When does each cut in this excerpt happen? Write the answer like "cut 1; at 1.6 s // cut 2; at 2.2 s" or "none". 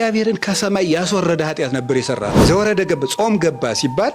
cut 1; at 2.4 s